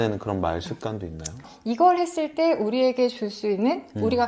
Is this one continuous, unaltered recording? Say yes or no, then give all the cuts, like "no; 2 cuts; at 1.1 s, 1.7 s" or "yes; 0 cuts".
no; 1 cut; at 1.5 s